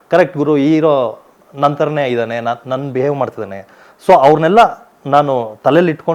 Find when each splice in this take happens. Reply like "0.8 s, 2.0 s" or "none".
none